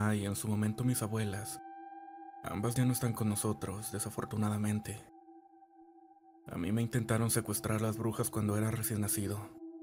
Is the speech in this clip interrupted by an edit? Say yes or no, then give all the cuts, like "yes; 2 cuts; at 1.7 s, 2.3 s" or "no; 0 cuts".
no; 0 cuts